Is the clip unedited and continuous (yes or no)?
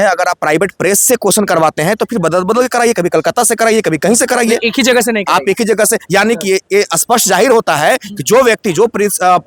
yes